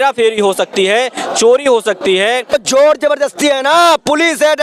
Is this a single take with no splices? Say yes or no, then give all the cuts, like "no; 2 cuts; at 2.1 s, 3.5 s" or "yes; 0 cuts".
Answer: no; 1 cut; at 2.5 s